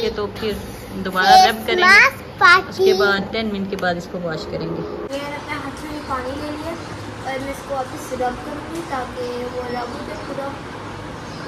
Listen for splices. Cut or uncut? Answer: uncut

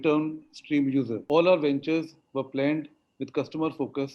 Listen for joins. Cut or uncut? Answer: cut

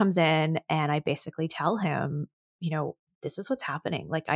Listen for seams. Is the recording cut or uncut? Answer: cut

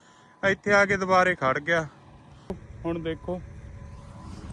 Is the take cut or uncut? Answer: cut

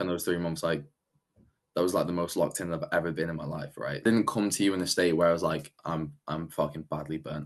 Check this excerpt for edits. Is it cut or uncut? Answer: cut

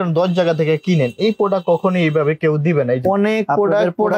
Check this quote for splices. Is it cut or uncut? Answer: cut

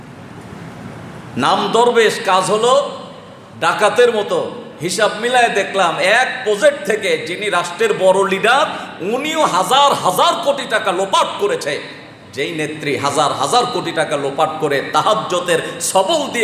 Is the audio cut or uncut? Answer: uncut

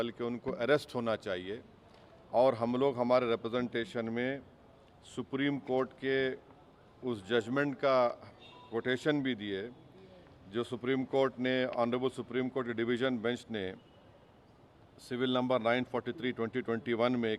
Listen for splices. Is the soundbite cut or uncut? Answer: uncut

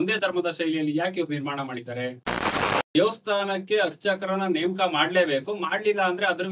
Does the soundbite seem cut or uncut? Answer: cut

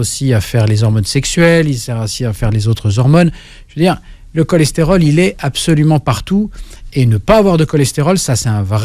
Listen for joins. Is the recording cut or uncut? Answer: uncut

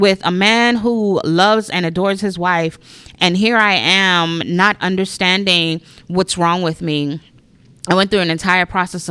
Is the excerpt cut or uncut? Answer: uncut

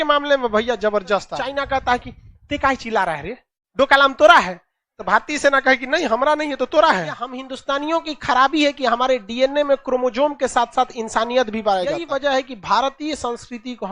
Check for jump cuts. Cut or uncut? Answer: cut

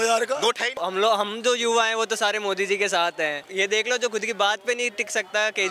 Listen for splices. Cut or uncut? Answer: cut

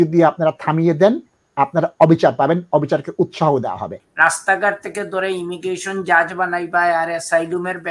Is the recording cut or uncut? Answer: cut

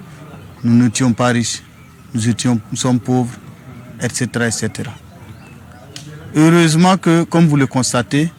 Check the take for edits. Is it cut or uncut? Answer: uncut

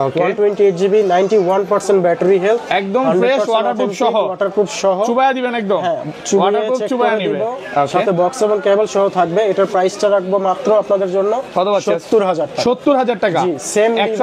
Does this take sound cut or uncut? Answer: uncut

